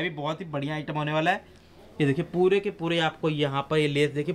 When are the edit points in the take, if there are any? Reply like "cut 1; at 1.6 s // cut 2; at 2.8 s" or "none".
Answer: none

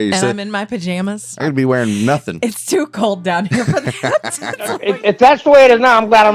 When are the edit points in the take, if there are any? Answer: cut 1; at 1.3 s // cut 2; at 4.7 s

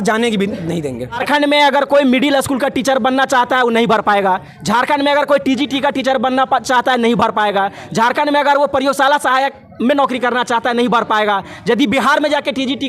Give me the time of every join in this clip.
cut 1; at 1.2 s

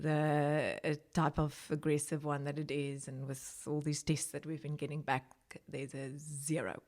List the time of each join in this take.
none

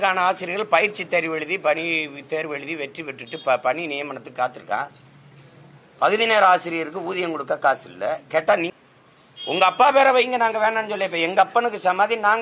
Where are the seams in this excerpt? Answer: cut 1; at 8.8 s

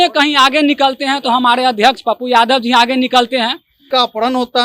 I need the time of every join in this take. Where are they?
cut 1; at 3.7 s

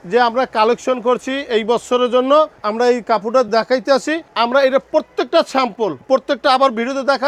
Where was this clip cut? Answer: none

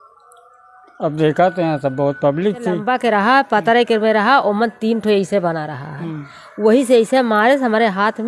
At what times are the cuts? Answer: cut 1; at 2.8 s

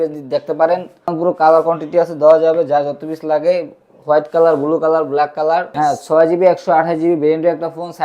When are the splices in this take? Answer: cut 1; at 1.1 s // cut 2; at 5.7 s

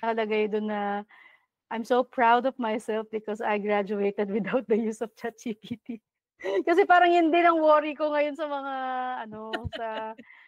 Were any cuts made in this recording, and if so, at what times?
none

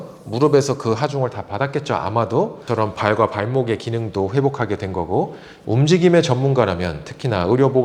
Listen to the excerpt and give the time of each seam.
cut 1; at 2.6 s // cut 2; at 5.5 s

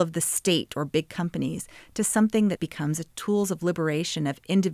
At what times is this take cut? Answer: cut 1; at 3.0 s

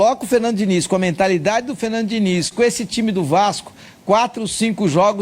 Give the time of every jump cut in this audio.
cut 1; at 2.5 s

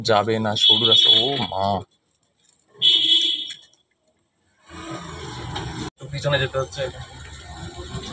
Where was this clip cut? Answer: none

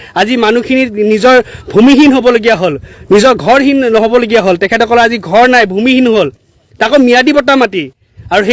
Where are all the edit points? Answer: none

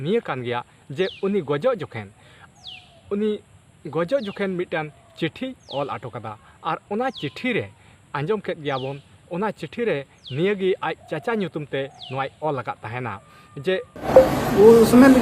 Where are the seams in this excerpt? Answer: cut 1; at 14.1 s

